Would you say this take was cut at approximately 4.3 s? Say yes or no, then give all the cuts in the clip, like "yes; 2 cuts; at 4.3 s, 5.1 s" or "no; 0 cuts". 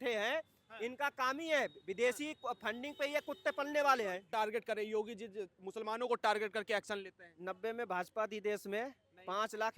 yes; 1 cut; at 4.3 s